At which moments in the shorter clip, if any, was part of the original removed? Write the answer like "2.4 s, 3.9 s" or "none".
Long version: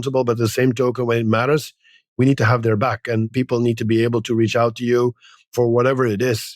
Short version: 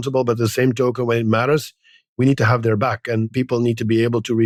none